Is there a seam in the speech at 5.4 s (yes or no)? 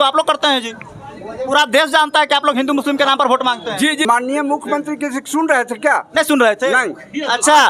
no